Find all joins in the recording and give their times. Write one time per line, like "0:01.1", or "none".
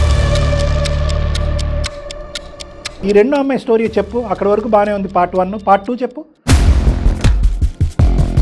0:03.0